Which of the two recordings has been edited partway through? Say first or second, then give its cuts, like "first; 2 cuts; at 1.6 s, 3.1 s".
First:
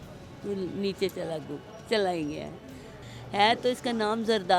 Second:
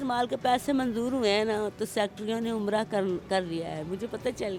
first; 1 cut; at 3.0 s